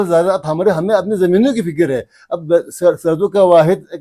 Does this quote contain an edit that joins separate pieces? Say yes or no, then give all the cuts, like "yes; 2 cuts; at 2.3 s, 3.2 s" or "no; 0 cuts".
no; 0 cuts